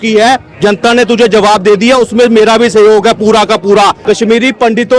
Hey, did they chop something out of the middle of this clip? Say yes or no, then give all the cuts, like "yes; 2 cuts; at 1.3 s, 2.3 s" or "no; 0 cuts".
yes; 1 cut; at 4.0 s